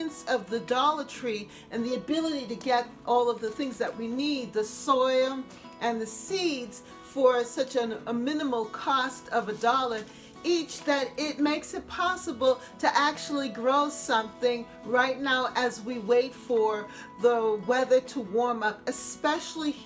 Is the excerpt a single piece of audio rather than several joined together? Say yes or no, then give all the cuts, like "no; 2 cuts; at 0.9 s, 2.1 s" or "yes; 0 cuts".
yes; 0 cuts